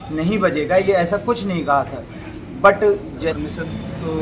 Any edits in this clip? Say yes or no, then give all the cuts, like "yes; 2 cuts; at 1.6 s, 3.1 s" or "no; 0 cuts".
yes; 1 cut; at 3.2 s